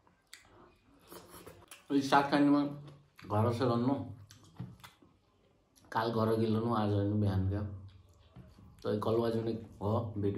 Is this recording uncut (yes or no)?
no